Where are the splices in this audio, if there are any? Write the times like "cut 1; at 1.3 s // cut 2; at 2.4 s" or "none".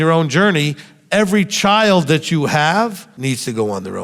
cut 1; at 3.1 s